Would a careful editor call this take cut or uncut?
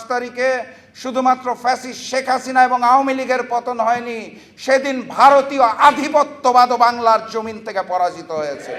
uncut